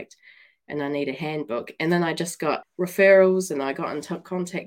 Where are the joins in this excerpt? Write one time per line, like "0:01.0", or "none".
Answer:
0:02.6